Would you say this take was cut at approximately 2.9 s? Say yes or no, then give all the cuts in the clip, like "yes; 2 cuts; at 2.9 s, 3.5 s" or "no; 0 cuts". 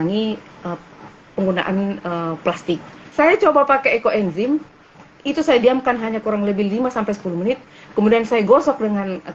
yes; 1 cut; at 2.9 s